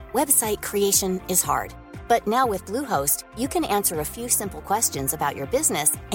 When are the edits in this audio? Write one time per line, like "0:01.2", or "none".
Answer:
none

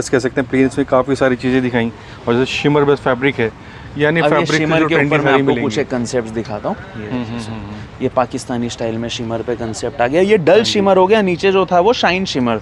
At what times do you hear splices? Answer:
none

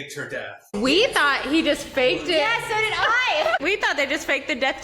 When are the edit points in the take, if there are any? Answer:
0:00.8
0:03.6

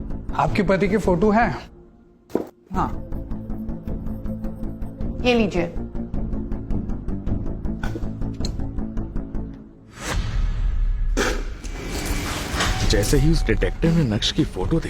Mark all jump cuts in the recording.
none

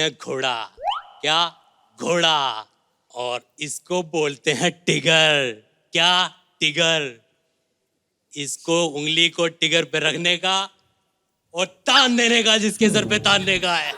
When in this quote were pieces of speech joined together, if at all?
none

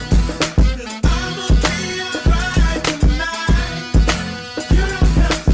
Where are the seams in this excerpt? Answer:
none

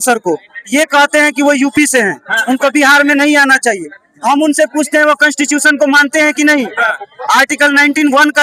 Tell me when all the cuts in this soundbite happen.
none

